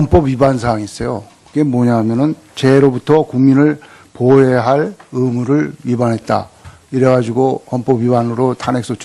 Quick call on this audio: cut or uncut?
uncut